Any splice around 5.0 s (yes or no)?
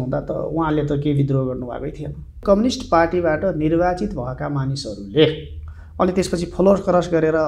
no